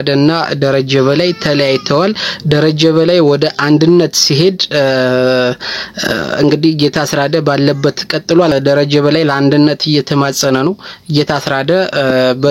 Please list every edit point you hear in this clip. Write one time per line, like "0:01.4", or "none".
0:08.5

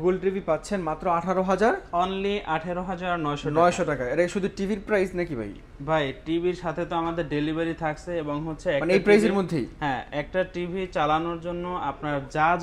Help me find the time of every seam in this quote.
none

